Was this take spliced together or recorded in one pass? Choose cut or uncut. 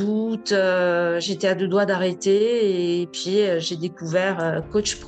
uncut